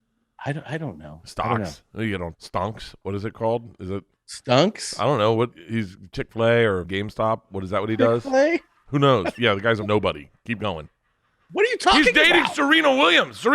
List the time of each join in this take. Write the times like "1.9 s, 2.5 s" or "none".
2.3 s, 5.5 s, 6.9 s, 9.7 s